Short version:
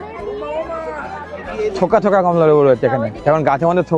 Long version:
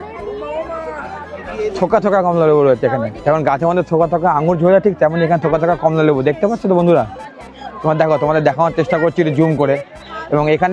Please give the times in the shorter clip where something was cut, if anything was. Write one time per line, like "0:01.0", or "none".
none